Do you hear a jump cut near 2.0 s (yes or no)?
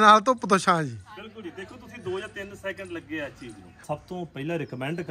no